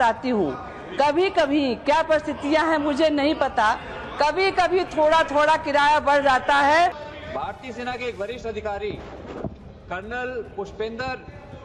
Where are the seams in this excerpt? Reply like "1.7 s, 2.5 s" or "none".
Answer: 7.0 s

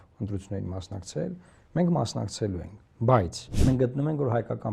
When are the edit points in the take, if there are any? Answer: 3.4 s

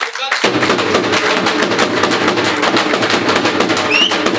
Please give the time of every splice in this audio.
none

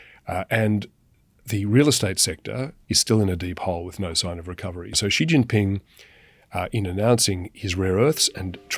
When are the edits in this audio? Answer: 2.7 s, 4.9 s

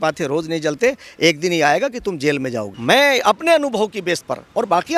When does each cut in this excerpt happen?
2.7 s

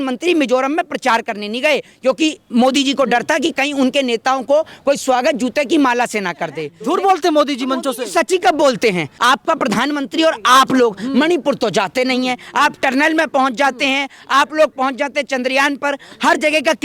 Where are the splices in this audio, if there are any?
6.7 s, 9.1 s

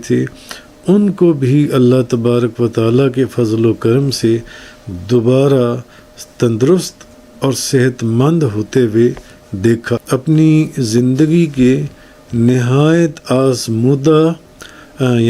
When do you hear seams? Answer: 10.0 s

